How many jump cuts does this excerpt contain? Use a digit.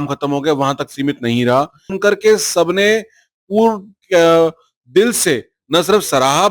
1